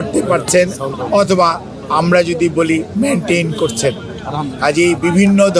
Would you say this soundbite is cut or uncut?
uncut